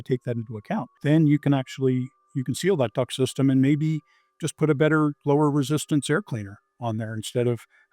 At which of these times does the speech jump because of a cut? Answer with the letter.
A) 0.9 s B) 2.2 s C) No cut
A